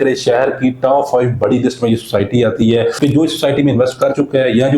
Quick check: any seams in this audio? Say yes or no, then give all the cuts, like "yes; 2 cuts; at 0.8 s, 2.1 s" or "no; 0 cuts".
yes; 1 cut; at 2.9 s